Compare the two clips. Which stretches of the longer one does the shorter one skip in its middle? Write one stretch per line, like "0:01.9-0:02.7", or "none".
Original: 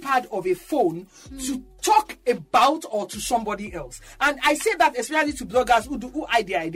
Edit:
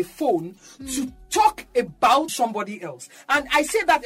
0:02.8-0:03.2